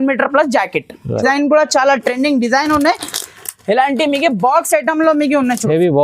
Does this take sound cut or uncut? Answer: cut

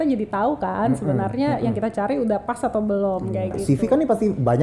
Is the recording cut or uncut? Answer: cut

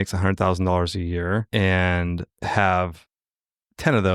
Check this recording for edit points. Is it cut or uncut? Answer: cut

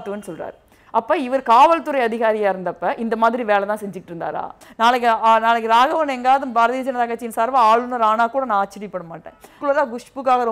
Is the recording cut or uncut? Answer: cut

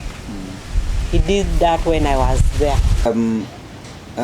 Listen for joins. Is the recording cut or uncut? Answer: cut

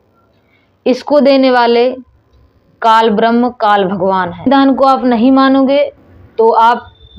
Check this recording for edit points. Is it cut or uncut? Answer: cut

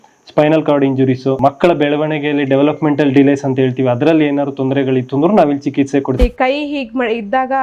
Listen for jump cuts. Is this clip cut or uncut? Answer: cut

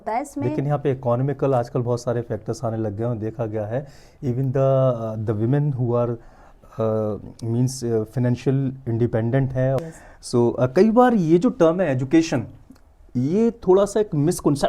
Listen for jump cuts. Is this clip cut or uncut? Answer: cut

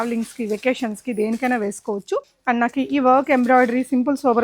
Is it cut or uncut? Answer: cut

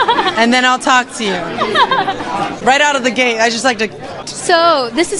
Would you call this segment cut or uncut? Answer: cut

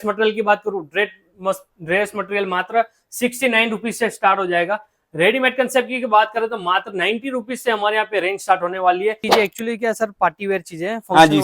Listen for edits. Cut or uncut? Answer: cut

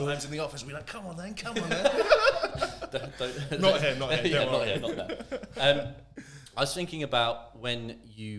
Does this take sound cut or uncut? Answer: uncut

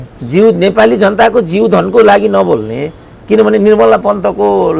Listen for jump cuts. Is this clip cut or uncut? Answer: uncut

